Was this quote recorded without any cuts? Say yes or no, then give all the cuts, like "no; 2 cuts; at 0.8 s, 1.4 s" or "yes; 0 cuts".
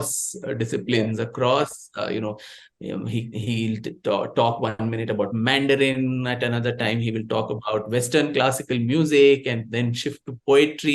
yes; 0 cuts